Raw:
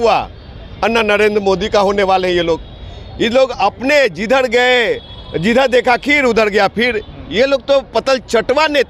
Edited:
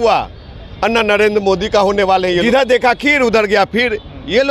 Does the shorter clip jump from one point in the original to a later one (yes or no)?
yes